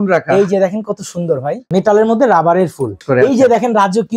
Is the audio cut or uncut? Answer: cut